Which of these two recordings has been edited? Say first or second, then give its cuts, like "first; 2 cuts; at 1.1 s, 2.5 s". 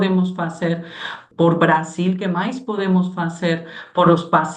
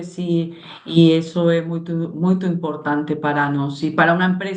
first; 1 cut; at 1.2 s